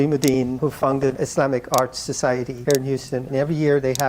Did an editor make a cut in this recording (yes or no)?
no